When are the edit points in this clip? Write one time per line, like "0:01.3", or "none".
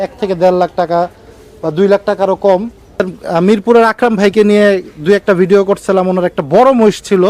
0:03.0